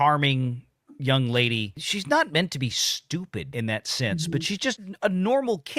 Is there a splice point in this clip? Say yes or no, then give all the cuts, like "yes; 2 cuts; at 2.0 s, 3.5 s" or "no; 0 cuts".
yes; 1 cut; at 3.5 s